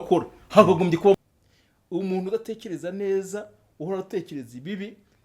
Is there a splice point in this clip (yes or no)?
yes